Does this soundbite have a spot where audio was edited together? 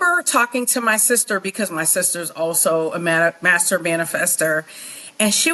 no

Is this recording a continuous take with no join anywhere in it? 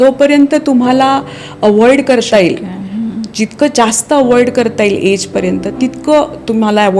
yes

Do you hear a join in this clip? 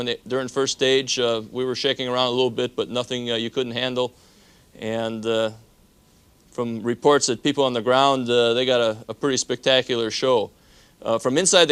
no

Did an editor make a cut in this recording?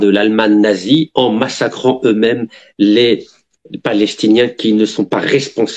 no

